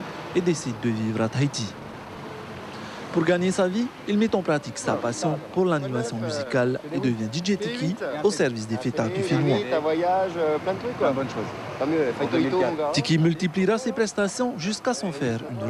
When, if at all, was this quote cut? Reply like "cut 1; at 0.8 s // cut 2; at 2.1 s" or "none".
none